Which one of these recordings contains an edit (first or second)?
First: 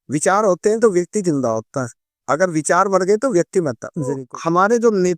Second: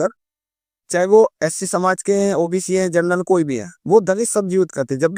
first